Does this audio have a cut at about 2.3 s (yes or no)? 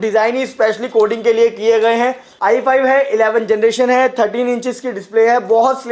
yes